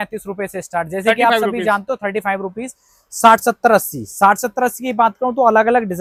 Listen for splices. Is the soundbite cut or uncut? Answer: uncut